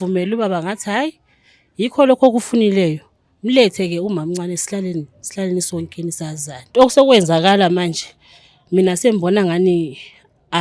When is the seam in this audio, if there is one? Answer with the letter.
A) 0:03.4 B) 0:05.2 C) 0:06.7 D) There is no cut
C